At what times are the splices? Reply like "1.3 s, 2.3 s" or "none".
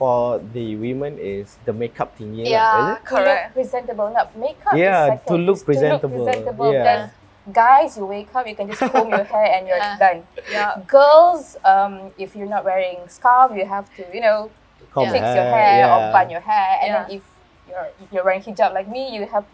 none